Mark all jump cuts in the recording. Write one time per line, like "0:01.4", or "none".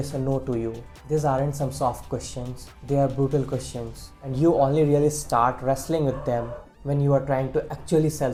none